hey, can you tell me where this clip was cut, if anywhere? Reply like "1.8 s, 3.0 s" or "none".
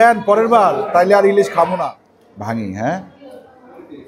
1.9 s